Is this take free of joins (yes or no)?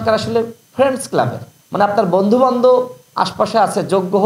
yes